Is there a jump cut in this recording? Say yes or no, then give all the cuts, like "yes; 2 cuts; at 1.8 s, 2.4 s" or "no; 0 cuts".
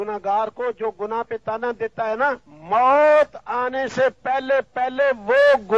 yes; 1 cut; at 2.5 s